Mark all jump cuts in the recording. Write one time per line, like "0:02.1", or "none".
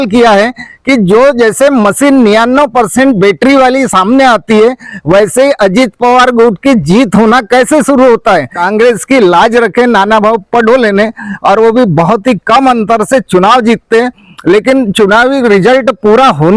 0:08.6